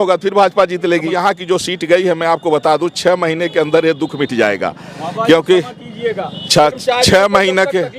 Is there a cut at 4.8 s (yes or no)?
no